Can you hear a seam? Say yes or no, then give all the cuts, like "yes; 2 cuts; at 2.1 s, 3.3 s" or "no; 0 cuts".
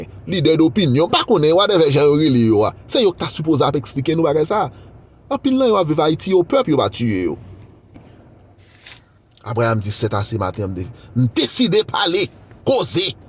yes; 1 cut; at 8.0 s